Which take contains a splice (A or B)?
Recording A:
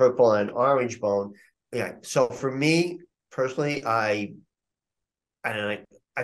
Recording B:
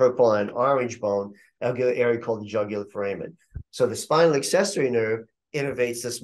A